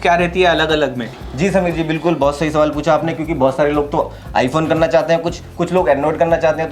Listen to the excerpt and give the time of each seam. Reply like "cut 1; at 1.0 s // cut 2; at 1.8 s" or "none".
none

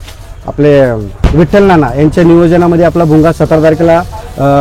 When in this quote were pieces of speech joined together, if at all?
none

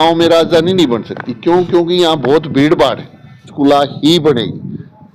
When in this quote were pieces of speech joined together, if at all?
cut 1; at 3.4 s

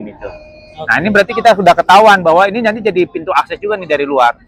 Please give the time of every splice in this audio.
none

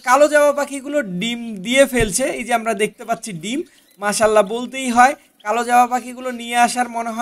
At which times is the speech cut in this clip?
none

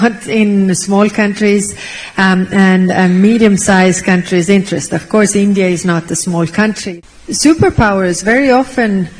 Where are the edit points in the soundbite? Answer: cut 1; at 6.8 s

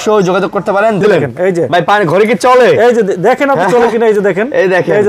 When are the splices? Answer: cut 1; at 1.0 s

